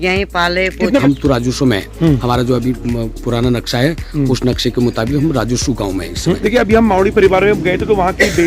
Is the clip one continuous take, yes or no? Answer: no